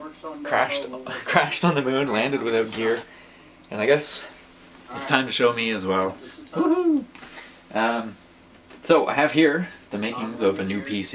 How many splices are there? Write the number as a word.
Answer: one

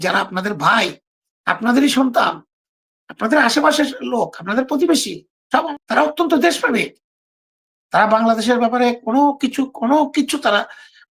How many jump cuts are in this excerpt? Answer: one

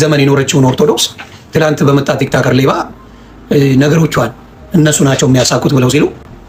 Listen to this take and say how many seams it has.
zero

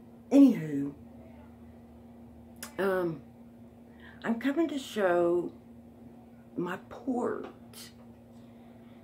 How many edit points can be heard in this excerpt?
one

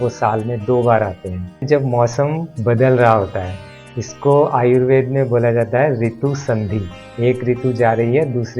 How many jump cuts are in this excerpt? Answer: two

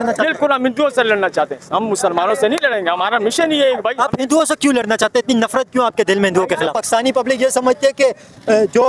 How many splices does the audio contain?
one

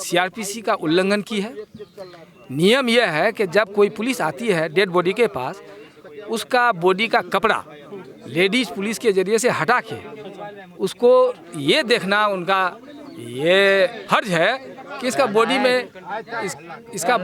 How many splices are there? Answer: zero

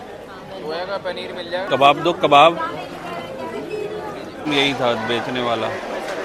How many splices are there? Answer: one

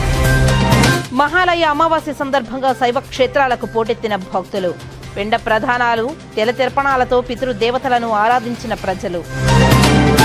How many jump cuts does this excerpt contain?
one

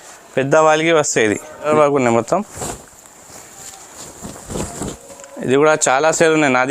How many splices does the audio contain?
one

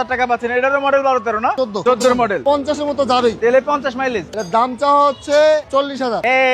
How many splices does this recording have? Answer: two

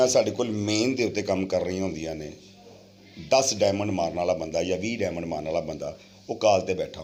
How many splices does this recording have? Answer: zero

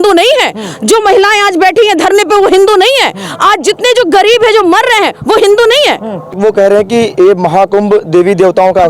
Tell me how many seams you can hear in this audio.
one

